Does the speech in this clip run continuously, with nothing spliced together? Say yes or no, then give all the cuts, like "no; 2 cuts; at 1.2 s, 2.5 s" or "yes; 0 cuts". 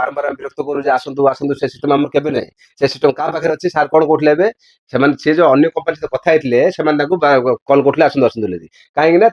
yes; 0 cuts